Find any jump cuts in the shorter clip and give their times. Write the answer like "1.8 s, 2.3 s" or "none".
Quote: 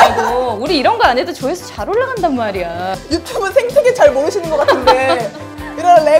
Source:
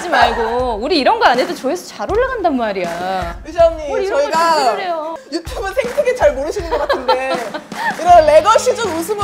3.0 s